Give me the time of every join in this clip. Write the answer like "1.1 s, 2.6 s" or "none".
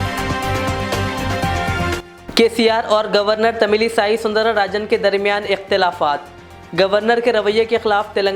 2.0 s